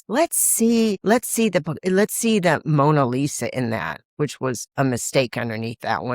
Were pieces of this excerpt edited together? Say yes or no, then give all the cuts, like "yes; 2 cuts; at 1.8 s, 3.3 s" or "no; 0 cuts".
yes; 1 cut; at 1.0 s